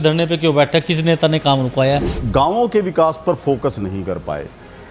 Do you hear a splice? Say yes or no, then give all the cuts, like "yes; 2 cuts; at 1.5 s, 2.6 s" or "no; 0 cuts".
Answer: yes; 1 cut; at 2.2 s